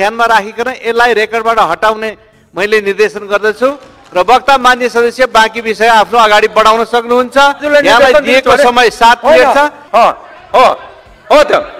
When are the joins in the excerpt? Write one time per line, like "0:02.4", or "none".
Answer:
0:09.8